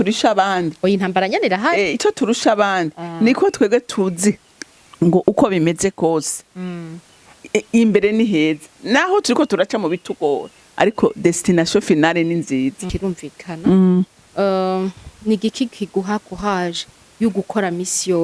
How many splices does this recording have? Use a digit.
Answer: 1